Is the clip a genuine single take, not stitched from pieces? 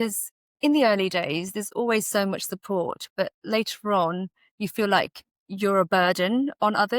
yes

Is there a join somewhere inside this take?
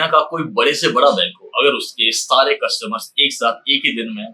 no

